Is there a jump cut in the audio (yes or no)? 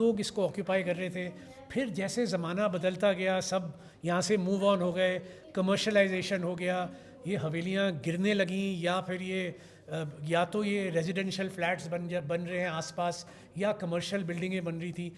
no